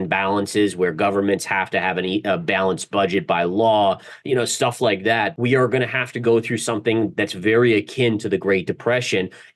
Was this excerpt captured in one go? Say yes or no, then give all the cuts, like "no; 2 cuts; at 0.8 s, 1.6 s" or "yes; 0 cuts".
no; 1 cut; at 5.3 s